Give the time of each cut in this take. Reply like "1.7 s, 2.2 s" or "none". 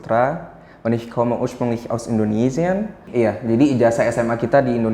3.0 s